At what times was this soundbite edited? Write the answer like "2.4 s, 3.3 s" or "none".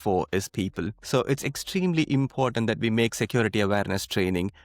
1.0 s